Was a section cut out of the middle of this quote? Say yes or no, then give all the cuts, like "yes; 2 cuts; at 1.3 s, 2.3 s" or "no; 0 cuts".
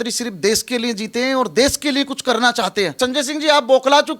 yes; 1 cut; at 3.0 s